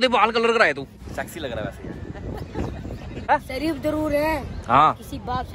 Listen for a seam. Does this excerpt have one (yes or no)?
yes